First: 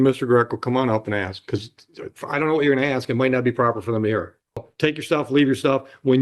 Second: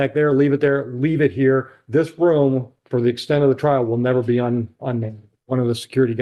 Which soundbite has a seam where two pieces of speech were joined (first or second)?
first